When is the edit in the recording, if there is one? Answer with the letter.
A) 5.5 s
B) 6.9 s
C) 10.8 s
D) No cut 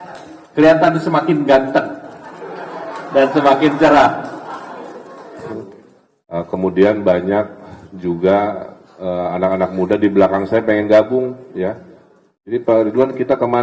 A